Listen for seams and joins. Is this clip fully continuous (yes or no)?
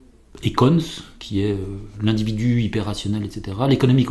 yes